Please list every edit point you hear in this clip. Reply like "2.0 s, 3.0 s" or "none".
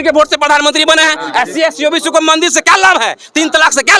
none